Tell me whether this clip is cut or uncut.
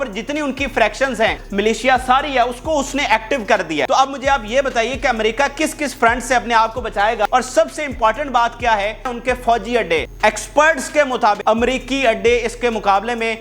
cut